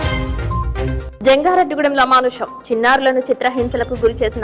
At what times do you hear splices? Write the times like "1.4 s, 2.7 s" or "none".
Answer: 1.0 s